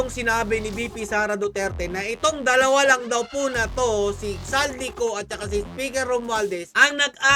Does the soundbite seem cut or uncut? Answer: uncut